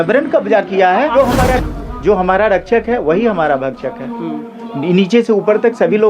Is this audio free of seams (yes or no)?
no